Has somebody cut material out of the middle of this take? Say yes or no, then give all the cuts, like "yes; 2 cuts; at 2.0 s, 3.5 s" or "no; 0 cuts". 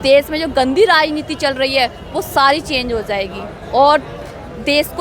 no; 0 cuts